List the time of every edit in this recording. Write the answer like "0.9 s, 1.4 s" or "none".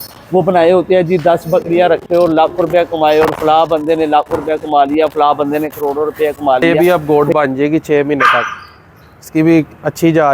6.6 s